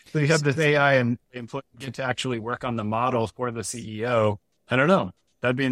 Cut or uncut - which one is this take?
cut